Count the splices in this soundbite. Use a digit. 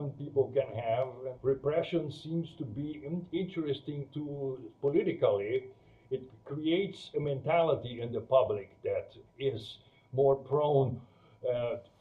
2